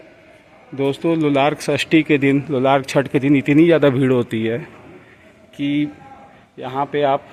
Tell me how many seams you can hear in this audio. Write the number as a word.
zero